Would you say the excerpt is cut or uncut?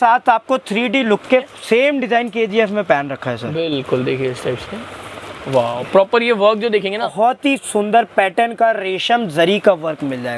cut